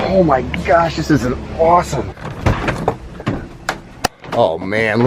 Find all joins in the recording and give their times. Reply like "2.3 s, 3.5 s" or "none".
none